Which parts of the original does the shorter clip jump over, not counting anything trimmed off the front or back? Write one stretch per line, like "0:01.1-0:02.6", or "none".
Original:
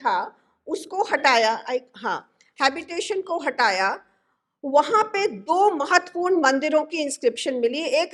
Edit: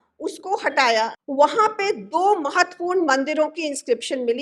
0:01.6-0:04.5